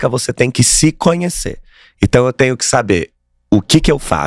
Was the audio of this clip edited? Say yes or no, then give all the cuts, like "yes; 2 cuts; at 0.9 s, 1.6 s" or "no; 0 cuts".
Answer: no; 0 cuts